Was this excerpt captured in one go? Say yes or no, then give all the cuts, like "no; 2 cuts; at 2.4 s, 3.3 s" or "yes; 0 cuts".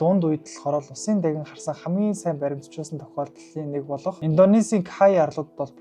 yes; 0 cuts